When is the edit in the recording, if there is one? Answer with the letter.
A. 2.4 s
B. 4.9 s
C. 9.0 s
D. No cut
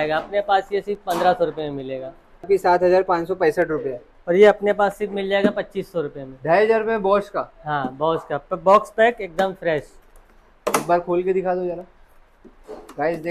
A